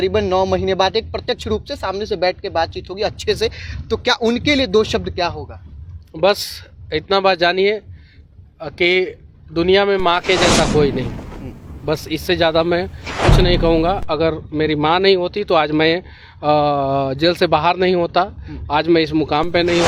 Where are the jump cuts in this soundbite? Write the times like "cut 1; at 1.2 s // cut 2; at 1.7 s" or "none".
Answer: none